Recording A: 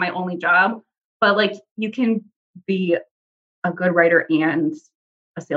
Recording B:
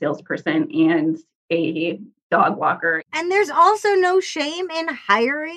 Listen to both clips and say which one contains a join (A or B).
B